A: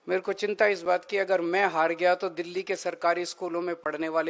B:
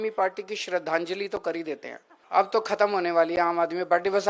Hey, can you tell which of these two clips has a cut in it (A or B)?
B